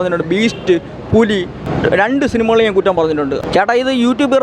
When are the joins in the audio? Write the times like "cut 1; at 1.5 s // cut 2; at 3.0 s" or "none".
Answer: cut 1; at 1.6 s // cut 2; at 2.9 s